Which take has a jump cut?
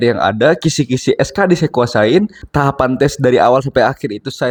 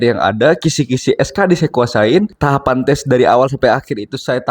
second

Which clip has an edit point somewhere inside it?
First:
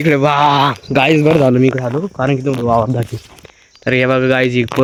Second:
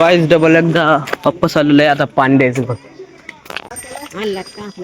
second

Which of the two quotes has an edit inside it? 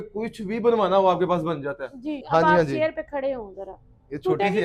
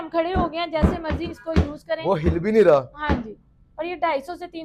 first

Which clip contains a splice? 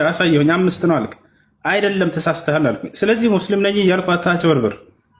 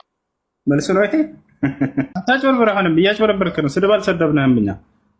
second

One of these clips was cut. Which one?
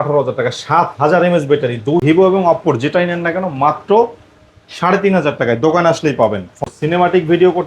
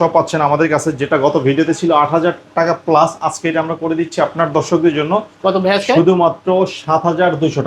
first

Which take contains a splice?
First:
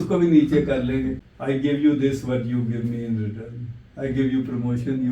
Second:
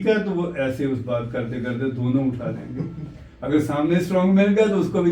first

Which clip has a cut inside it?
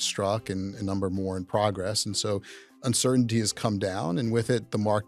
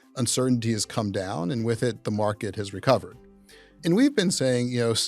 second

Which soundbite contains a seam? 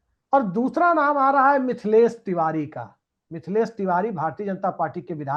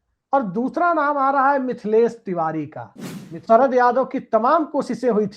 second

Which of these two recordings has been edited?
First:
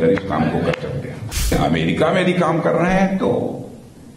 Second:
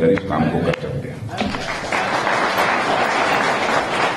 first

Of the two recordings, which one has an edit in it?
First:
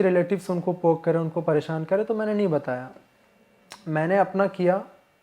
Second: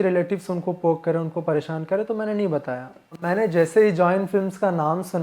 second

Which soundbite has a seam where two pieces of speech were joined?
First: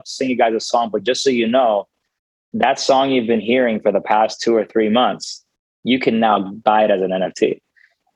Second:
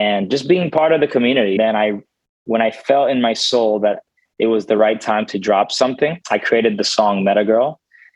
second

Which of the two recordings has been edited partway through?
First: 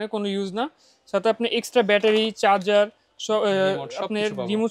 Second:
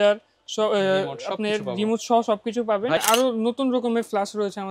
second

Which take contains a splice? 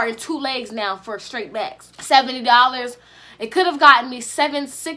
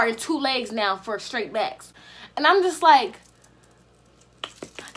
first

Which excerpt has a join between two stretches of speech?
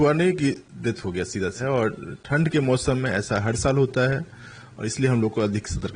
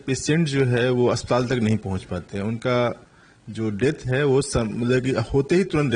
first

